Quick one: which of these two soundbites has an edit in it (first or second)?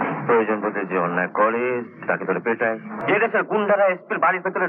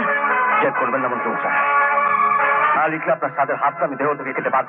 first